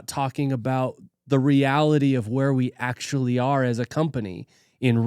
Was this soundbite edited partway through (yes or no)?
no